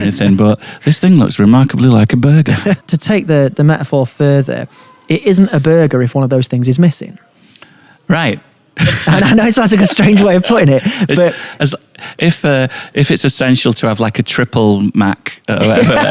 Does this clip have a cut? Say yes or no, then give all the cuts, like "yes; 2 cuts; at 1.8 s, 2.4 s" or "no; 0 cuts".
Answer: yes; 1 cut; at 2.8 s